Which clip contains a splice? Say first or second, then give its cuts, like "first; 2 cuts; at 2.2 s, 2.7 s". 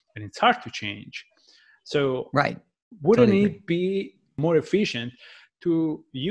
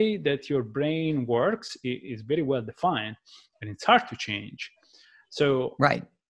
first; 1 cut; at 4.2 s